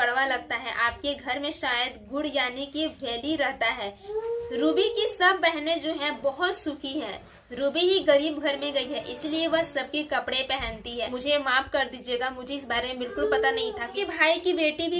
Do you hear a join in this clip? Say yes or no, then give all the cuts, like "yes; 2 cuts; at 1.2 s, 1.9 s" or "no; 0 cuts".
yes; 3 cuts; at 4.0 s, 11.1 s, 13.9 s